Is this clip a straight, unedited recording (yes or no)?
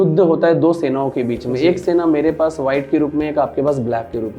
yes